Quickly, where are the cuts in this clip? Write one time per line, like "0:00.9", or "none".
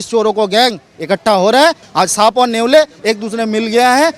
0:01.8